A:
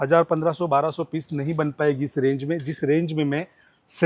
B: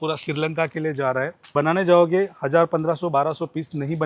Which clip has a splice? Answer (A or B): B